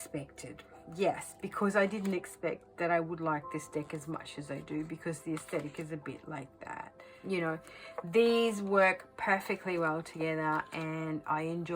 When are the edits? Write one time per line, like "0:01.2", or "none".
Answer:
0:07.0